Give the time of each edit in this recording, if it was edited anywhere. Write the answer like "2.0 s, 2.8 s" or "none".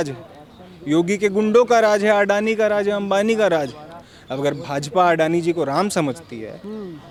none

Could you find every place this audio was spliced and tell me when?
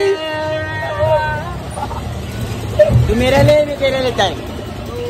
none

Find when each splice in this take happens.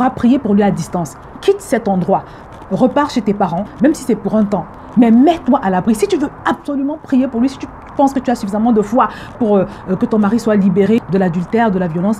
4.8 s

